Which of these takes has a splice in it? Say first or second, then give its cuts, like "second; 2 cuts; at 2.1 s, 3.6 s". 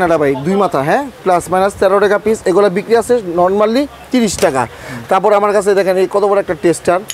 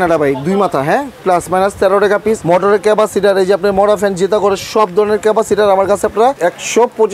second; 2 cuts; at 2.4 s, 6.4 s